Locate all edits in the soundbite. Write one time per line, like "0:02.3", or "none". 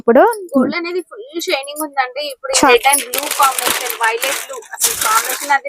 0:02.7